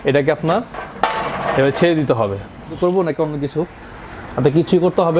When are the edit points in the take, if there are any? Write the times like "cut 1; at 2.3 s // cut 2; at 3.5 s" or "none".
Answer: cut 1; at 2.7 s